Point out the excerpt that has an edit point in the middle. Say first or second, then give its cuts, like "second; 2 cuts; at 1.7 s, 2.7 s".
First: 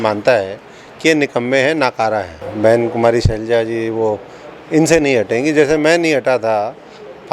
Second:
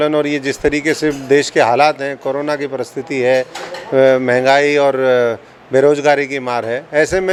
first; 1 cut; at 2.4 s